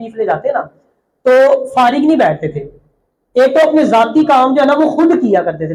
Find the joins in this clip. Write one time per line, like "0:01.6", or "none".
none